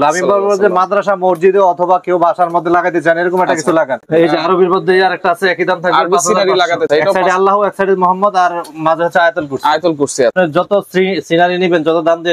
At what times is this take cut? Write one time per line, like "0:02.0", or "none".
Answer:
0:04.0
0:06.9
0:10.3

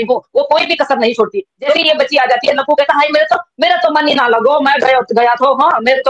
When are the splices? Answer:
0:01.8

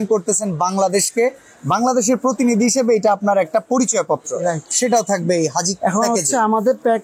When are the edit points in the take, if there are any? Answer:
none

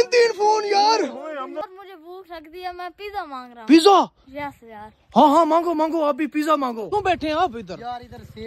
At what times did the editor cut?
0:01.6
0:06.9

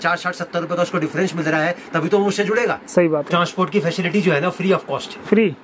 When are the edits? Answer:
0:03.2

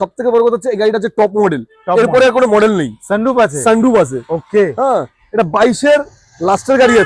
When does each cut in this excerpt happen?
none

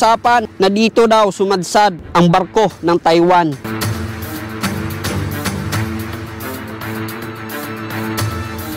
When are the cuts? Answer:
none

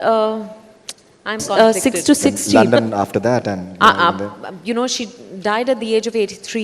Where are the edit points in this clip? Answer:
0:01.5

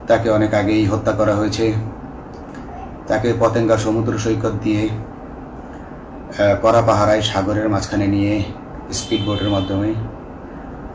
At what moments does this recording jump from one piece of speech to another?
none

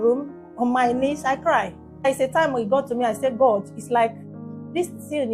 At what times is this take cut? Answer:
0:02.0

